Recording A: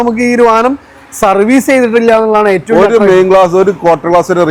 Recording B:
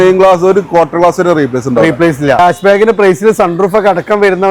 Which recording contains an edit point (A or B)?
B